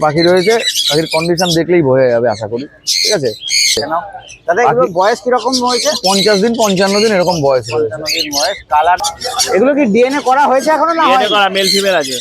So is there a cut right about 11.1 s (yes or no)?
no